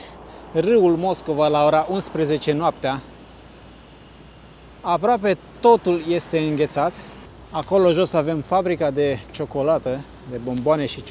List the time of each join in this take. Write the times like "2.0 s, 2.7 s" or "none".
none